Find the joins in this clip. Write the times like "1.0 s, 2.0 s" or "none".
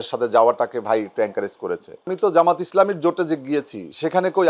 2.1 s